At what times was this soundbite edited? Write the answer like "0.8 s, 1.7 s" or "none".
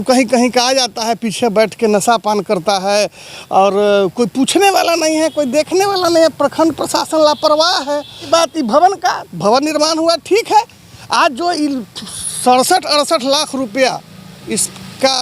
8.3 s